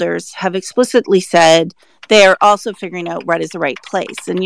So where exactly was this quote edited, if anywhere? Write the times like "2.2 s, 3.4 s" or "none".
none